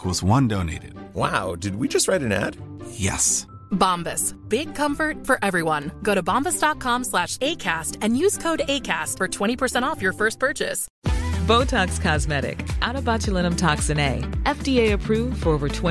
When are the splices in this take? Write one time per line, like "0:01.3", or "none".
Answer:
0:10.9